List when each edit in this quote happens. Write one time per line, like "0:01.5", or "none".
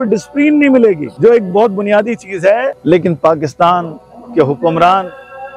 0:01.1
0:02.7